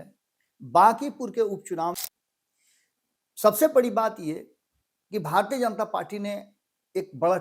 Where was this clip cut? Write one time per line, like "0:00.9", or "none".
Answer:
0:01.9